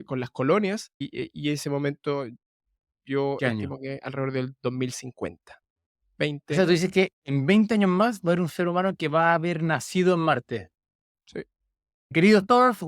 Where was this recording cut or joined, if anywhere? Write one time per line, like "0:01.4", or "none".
0:01.0
0:12.1